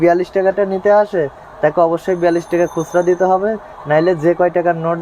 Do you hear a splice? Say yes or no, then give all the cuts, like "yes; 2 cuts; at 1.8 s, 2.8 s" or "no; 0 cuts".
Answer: no; 0 cuts